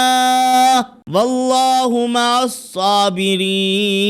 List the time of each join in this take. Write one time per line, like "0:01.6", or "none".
0:01.0